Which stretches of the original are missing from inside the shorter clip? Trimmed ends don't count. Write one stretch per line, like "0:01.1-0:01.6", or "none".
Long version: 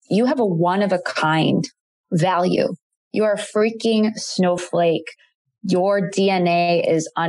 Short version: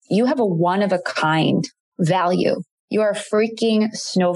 0:01.8-0:01.9
0:02.9-0:03.0